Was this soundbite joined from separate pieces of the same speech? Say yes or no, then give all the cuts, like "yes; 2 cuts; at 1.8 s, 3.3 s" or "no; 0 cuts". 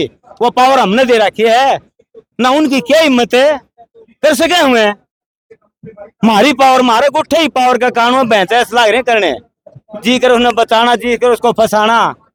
no; 0 cuts